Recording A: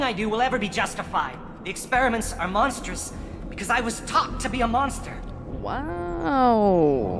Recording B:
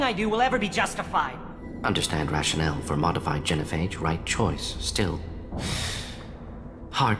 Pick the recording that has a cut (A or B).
B